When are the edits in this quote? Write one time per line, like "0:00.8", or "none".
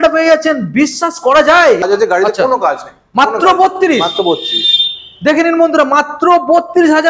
0:01.8